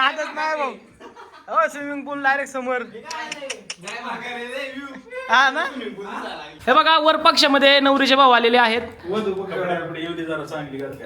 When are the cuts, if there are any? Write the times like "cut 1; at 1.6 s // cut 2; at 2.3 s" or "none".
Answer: cut 1; at 6.4 s